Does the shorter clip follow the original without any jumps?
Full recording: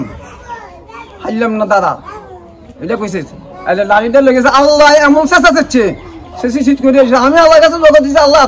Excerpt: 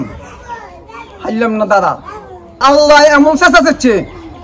no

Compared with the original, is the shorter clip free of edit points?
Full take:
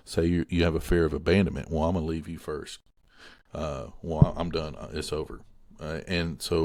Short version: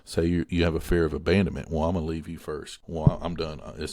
no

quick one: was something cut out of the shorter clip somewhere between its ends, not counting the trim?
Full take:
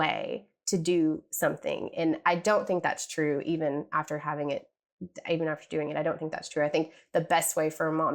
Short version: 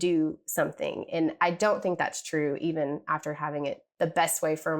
yes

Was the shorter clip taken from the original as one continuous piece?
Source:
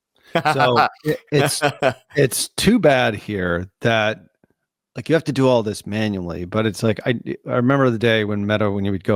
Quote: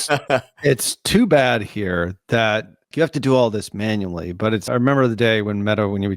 no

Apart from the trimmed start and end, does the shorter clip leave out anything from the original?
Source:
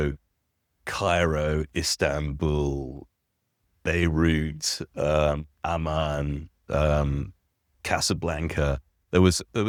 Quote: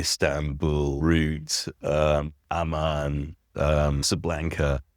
yes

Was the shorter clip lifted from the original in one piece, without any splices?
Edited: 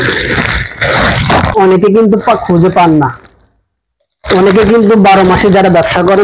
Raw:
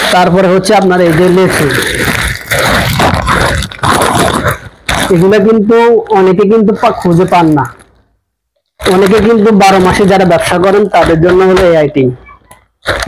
no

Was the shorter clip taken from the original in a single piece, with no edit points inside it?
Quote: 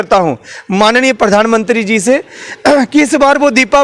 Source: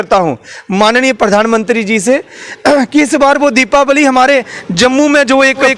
yes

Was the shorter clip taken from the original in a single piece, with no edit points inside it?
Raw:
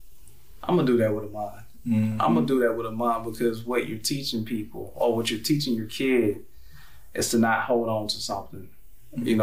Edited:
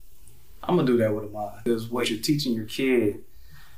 no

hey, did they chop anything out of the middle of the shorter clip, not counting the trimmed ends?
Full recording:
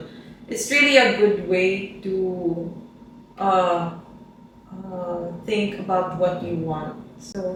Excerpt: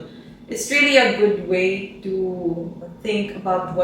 yes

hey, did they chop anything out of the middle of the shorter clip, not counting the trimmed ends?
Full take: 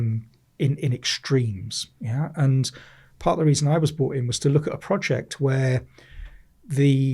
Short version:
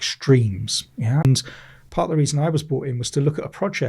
yes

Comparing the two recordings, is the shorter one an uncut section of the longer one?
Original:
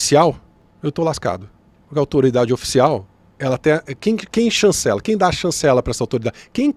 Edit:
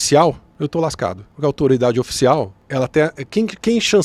no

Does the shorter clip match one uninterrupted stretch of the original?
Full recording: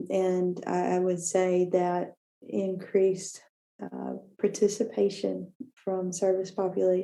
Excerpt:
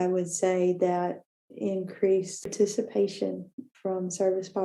no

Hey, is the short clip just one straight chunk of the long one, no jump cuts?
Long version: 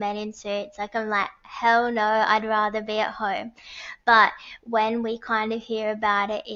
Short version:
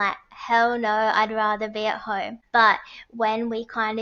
no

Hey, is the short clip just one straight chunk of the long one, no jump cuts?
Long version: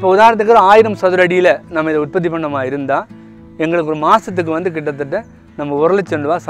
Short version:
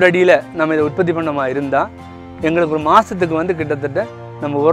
yes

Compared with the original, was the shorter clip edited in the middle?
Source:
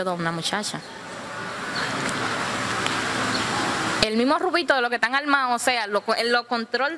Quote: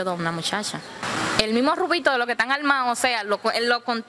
yes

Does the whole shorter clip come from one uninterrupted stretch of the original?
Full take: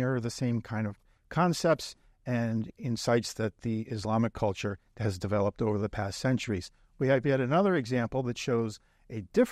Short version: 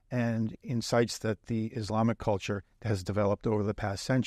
yes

